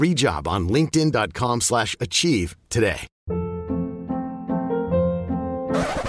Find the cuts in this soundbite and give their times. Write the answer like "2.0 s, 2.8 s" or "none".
3.1 s